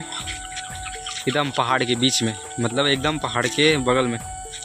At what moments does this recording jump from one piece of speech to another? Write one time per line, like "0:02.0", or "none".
none